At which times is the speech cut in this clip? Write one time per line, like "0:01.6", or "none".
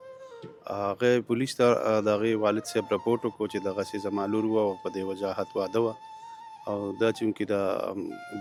none